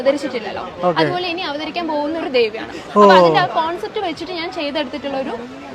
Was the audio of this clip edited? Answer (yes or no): no